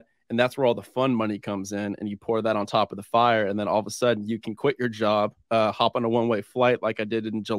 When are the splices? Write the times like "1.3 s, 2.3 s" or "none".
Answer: none